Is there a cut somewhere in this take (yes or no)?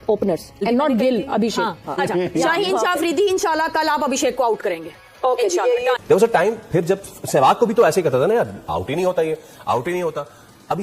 yes